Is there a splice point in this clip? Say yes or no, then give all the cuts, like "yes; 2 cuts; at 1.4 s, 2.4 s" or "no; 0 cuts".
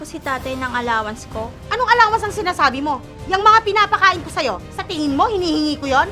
yes; 1 cut; at 1.6 s